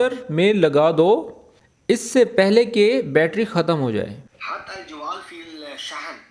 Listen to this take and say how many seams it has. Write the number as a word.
two